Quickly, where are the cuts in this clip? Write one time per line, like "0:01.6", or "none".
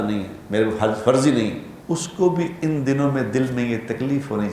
0:01.7

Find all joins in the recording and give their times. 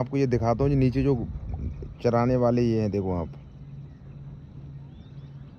none

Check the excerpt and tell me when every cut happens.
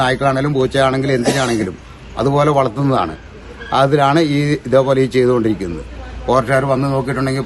none

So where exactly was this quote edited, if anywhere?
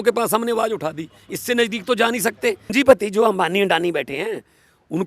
0:02.7

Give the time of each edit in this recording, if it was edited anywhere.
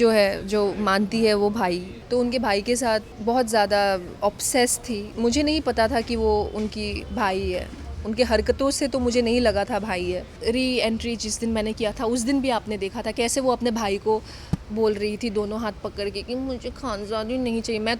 0:01.9
0:03.1
0:05.1
0:10.3

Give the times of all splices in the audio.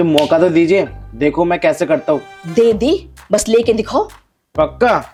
none

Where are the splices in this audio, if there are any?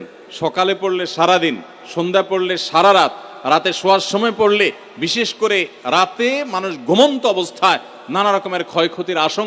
none

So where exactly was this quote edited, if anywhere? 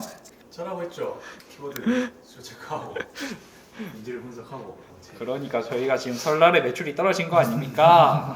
0:04.9

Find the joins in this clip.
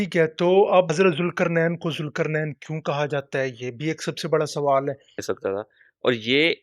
0:00.9
0:05.2

